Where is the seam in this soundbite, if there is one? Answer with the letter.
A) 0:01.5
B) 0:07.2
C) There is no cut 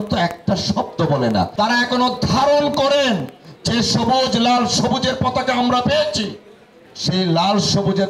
A